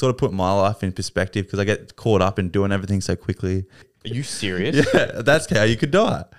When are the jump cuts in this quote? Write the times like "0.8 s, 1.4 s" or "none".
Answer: 3.9 s